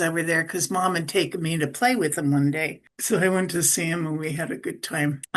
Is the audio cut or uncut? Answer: uncut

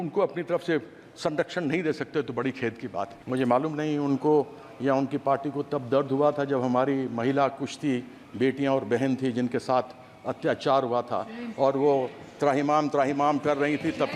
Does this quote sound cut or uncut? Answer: cut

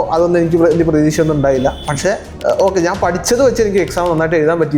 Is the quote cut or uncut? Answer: uncut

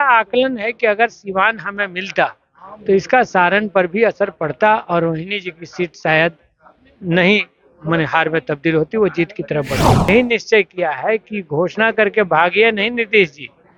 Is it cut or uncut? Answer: cut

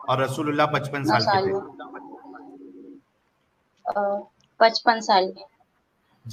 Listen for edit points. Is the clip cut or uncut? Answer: uncut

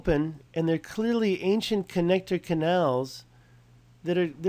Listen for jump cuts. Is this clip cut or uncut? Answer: uncut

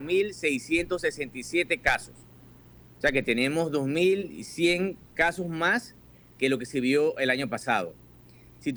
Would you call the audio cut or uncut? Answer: uncut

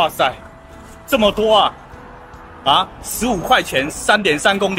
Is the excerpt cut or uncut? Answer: uncut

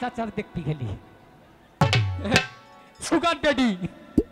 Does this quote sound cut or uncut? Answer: cut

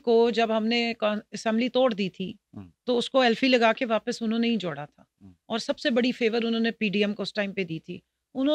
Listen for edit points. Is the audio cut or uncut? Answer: uncut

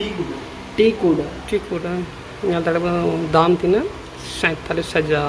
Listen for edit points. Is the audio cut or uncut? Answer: uncut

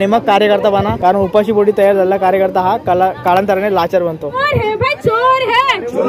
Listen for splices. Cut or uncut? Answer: cut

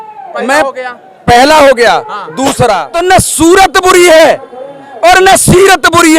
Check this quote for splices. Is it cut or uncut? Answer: cut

